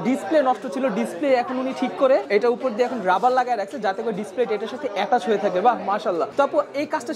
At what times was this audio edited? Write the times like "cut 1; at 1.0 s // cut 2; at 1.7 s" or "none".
none